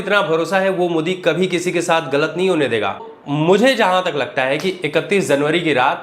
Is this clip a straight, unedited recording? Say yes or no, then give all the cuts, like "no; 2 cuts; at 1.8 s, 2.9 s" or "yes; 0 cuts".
no; 1 cut; at 3.1 s